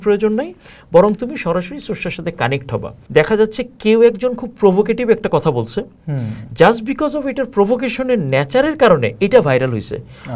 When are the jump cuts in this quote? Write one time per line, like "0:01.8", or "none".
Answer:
0:02.9